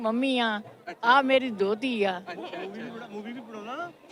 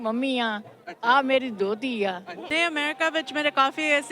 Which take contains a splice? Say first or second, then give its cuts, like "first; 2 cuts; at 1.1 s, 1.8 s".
second; 1 cut; at 2.3 s